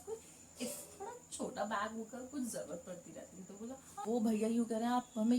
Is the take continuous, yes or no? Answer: no